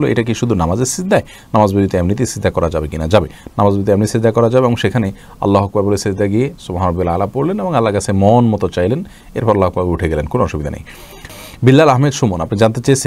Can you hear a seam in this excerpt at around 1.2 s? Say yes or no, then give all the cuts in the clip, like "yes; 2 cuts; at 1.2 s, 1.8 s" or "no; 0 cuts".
no; 0 cuts